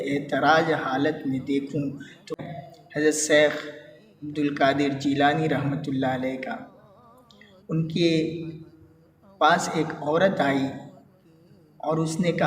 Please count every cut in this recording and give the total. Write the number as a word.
one